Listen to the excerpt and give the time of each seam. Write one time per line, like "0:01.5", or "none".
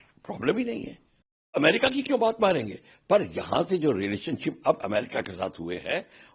0:01.6